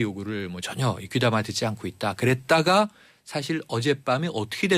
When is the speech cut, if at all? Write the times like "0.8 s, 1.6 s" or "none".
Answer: 1.3 s